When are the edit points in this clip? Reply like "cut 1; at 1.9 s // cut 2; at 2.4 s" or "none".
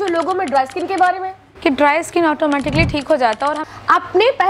cut 1; at 1.3 s // cut 2; at 3.6 s